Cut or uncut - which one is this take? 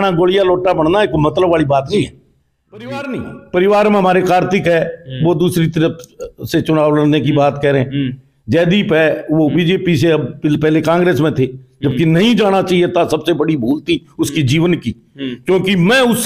cut